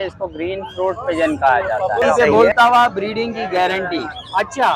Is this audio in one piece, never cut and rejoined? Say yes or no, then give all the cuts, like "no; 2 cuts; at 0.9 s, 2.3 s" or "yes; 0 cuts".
no; 1 cut; at 2.1 s